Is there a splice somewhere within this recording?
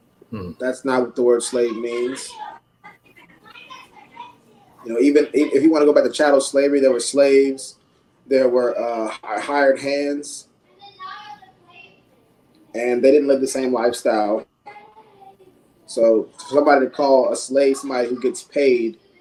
no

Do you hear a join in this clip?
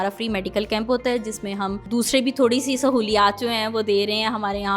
yes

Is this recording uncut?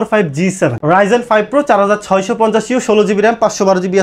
yes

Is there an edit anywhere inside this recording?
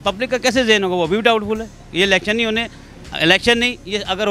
no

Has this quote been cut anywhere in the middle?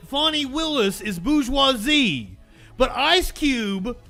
no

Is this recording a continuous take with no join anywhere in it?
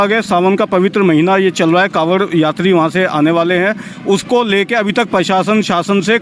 yes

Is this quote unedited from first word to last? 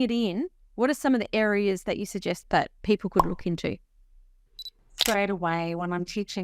no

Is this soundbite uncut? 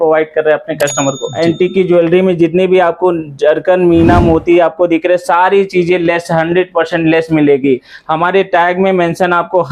no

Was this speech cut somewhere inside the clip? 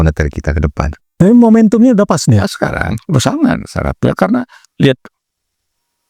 no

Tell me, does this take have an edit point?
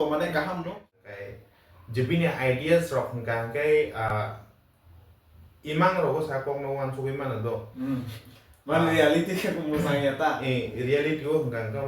yes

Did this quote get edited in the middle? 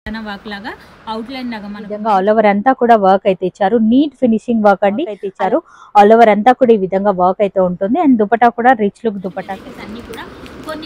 yes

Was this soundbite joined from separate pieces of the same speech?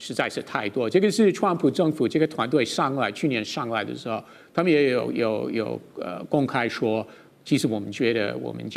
no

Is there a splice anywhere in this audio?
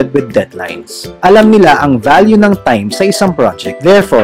no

